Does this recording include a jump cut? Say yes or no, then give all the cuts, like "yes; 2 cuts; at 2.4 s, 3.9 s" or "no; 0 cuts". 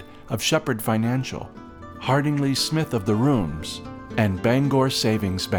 no; 0 cuts